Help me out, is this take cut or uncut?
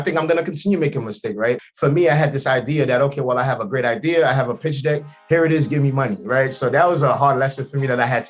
cut